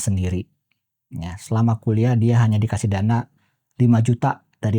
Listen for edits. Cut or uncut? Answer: uncut